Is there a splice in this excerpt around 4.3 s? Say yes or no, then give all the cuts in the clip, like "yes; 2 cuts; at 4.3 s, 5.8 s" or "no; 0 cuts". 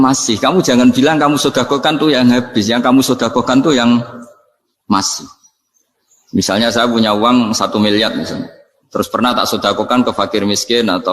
no; 0 cuts